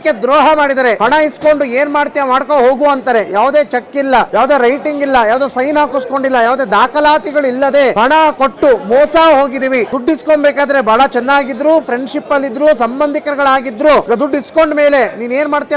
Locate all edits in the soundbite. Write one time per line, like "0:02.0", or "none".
0:01.0
0:04.3
0:07.9
0:09.9
0:14.0